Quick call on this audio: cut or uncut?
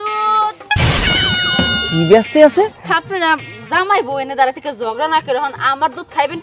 cut